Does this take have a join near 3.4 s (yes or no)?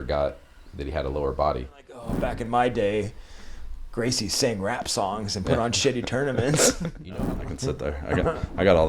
no